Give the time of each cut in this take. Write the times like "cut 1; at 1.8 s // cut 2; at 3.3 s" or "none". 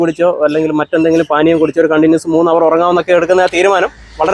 none